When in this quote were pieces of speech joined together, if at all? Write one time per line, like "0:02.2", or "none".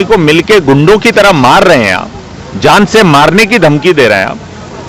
none